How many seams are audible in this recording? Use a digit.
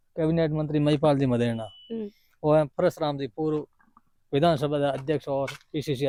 0